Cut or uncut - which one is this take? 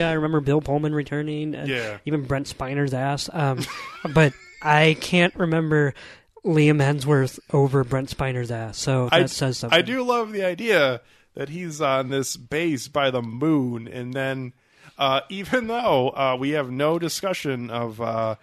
uncut